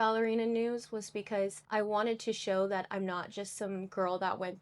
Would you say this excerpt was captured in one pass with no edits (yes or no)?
no